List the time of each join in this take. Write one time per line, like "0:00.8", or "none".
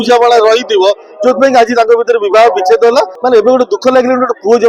0:03.2